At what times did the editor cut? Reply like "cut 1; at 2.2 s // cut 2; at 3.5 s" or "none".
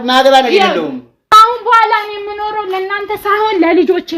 cut 1; at 1.2 s

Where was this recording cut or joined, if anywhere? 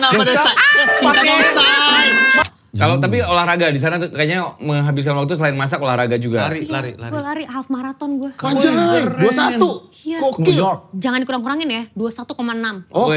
cut 1; at 2.5 s

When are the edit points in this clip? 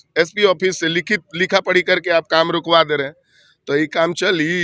none

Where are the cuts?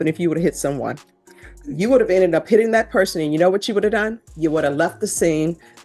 none

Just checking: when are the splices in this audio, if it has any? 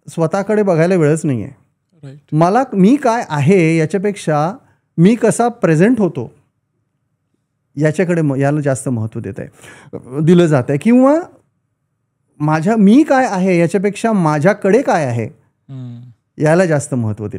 none

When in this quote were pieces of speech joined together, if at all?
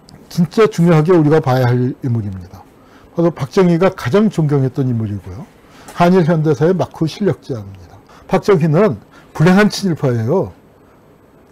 cut 1; at 8.1 s

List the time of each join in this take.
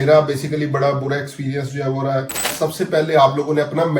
cut 1; at 2.5 s

